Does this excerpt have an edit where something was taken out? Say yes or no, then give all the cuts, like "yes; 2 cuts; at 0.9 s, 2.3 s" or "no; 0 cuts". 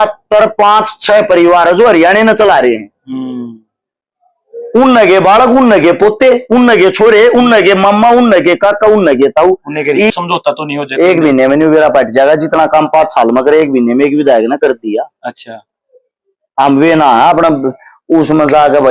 yes; 1 cut; at 10.1 s